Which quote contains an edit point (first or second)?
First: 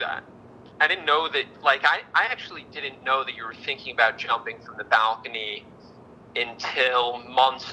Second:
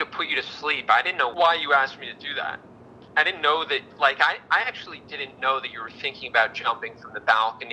second